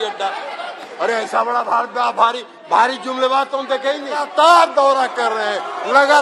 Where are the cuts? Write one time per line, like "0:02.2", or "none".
0:04.3